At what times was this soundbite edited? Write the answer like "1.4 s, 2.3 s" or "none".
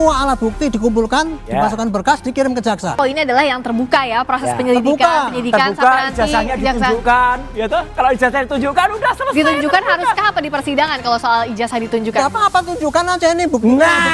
2.9 s

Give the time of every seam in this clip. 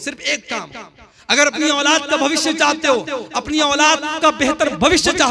none

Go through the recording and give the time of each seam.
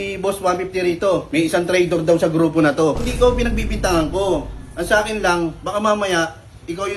1.3 s, 3.1 s

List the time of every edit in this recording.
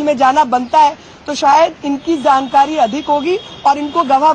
none

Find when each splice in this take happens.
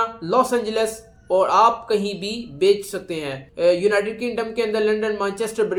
none

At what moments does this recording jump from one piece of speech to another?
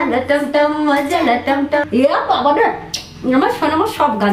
1.9 s

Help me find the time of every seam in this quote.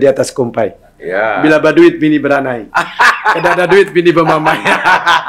none

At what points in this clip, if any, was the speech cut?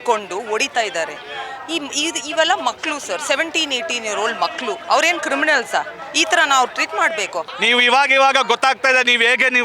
7.4 s

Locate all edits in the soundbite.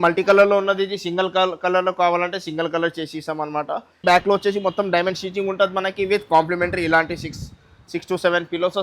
4.0 s

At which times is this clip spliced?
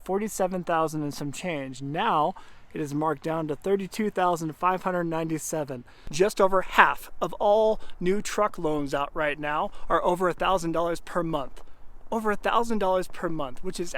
6.0 s

